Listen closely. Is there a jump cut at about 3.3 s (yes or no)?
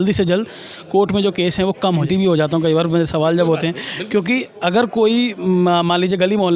no